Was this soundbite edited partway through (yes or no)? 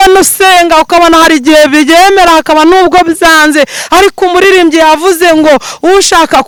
no